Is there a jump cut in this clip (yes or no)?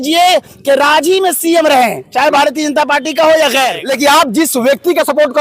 yes